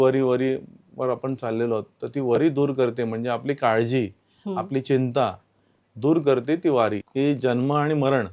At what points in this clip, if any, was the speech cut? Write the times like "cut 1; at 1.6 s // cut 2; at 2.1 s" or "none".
cut 1; at 7.0 s